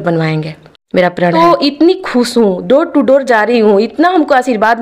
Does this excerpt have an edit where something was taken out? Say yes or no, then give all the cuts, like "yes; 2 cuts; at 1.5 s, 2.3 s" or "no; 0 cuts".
yes; 1 cut; at 1.3 s